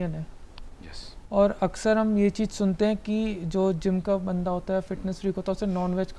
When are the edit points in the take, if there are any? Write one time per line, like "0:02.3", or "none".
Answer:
none

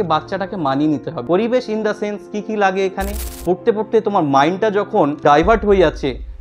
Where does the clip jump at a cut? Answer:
0:01.1
0:03.3
0:05.2

